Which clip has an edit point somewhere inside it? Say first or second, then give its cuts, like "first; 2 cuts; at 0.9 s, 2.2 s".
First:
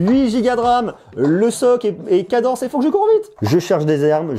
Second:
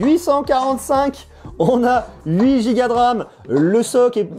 first; 1 cut; at 3.3 s